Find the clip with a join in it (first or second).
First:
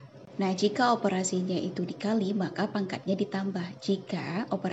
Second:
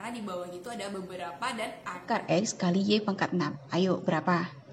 second